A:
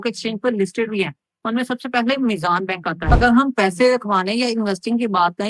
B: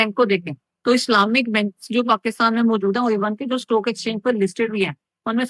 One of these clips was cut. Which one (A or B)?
A